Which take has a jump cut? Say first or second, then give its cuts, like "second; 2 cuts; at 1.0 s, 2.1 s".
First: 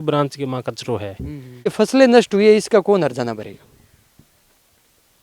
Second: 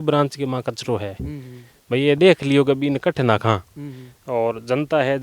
first; 1 cut; at 1.7 s